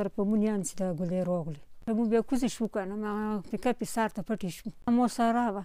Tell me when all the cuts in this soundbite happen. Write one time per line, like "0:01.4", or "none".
0:01.8
0:04.9